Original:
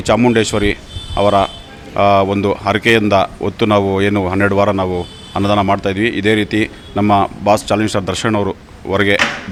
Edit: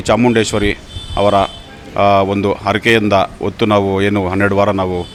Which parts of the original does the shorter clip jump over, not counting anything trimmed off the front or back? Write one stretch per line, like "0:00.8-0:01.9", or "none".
none